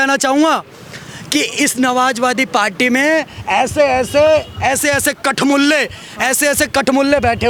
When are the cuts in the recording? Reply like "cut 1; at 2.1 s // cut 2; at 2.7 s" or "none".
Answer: none

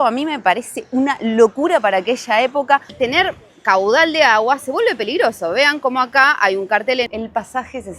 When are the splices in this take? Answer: cut 1; at 2.9 s // cut 2; at 7.1 s

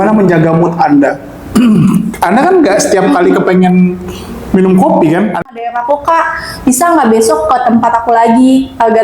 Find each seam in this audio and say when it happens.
cut 1; at 5.4 s

